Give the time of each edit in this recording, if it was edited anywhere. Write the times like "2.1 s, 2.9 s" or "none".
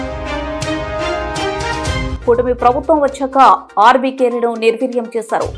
none